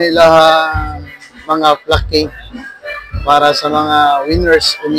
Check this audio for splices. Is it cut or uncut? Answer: uncut